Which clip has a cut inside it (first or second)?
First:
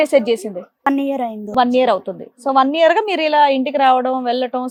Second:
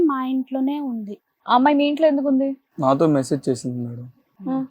second